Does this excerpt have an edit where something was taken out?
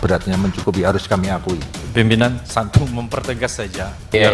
yes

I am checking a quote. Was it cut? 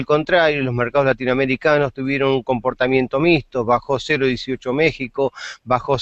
no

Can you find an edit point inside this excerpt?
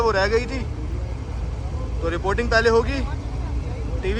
no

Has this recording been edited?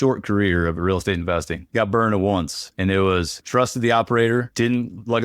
no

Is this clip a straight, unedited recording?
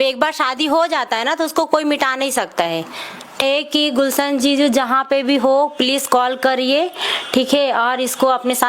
no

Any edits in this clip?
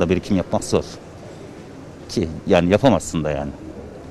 no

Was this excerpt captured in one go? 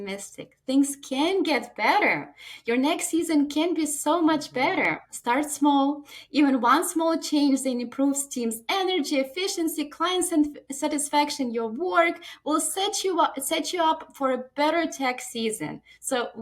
yes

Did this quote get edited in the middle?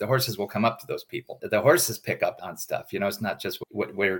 yes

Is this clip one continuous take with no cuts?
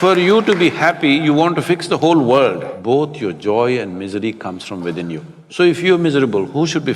no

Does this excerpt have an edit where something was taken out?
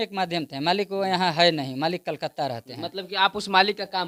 no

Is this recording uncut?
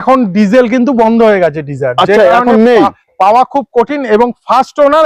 yes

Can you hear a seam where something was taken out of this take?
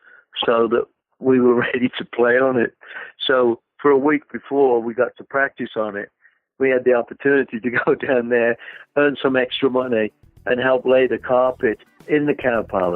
yes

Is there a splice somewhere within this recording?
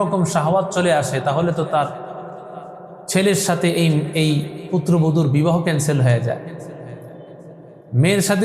no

